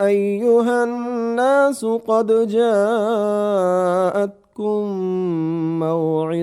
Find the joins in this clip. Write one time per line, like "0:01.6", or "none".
0:01.0